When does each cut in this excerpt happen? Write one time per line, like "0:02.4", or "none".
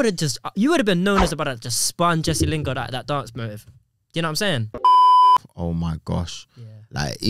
0:05.4

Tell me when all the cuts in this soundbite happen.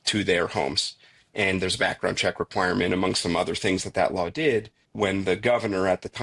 0:01.2
0:04.9

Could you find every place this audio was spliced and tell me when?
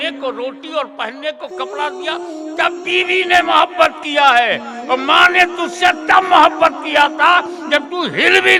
none

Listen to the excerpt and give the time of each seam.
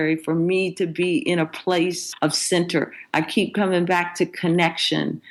none

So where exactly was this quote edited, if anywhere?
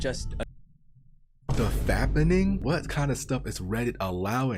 0:01.3

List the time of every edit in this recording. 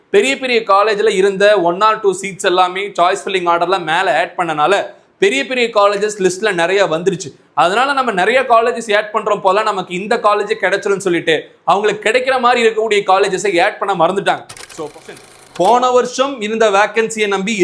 0:14.9

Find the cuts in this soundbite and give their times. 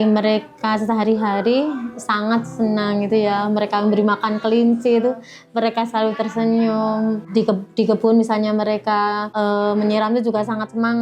none

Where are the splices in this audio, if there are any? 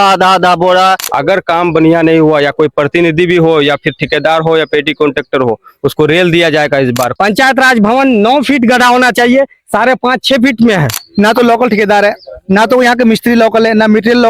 0:01.1
0:07.1
0:11.0

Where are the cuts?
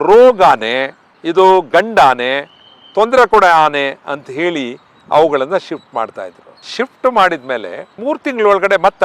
0:06.5
0:07.9

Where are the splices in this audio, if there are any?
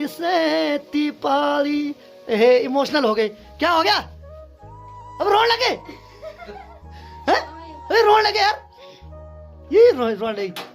none

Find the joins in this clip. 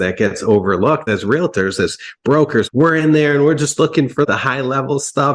0:01.1
0:04.3

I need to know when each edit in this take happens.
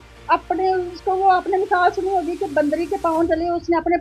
none

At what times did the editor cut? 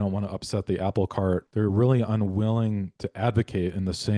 0:01.5
0:03.0

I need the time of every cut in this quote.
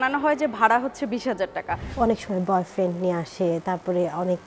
0:01.9

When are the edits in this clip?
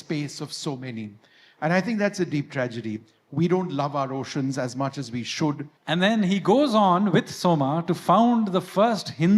0:05.7

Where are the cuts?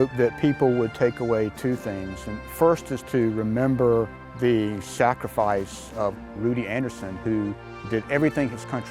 0:04.2
0:06.2
0:07.7

